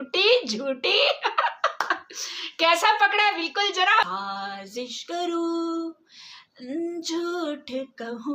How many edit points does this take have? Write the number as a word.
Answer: one